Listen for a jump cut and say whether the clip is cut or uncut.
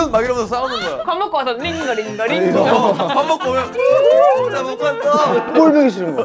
uncut